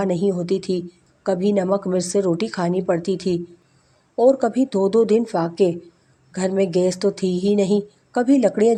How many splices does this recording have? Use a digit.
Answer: 0